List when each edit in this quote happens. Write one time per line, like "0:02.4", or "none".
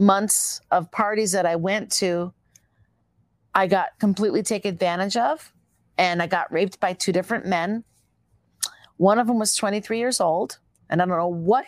none